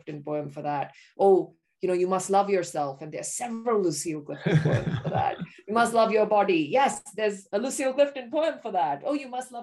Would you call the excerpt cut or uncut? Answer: uncut